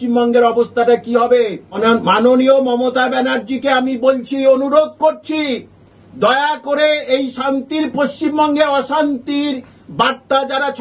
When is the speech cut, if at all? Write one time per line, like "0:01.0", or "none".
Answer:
0:01.8